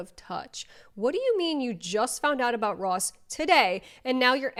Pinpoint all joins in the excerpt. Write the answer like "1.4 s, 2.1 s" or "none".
none